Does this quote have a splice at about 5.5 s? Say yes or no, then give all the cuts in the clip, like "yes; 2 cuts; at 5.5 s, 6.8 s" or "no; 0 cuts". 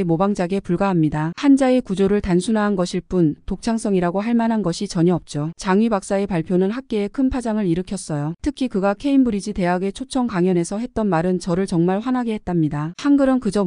no; 0 cuts